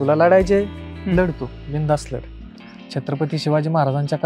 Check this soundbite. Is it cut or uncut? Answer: cut